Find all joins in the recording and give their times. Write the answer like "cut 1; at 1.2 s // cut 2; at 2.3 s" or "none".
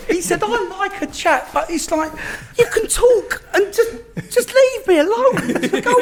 none